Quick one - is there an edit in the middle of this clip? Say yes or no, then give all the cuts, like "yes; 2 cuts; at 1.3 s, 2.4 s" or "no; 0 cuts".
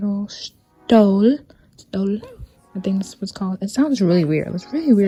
no; 0 cuts